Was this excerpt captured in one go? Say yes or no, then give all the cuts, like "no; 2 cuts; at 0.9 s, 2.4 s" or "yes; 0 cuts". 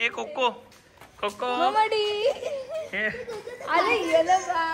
yes; 0 cuts